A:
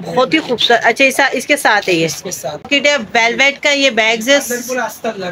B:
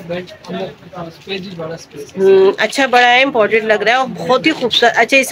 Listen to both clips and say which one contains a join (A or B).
A